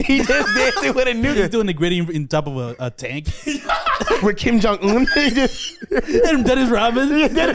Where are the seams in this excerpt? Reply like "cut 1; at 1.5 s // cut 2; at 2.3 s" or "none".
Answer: cut 1; at 1.4 s // cut 2; at 4.2 s